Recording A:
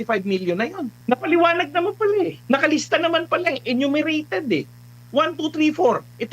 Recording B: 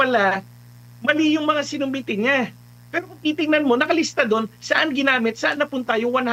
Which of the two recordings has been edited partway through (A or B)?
A